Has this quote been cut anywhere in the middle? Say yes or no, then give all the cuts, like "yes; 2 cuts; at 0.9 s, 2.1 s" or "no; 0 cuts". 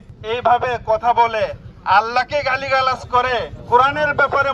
yes; 1 cut; at 3.5 s